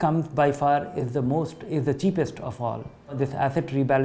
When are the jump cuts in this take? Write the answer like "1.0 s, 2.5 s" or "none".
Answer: 3.0 s

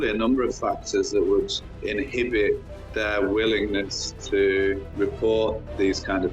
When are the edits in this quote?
1.6 s, 4.9 s

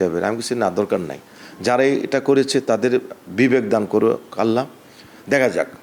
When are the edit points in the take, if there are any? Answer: none

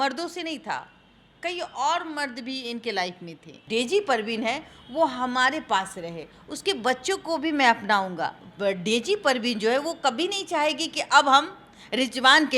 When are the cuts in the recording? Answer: 3.5 s, 8.4 s

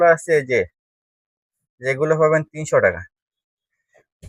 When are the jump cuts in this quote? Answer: none

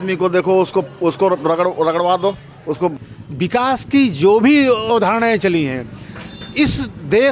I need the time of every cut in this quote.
2.9 s

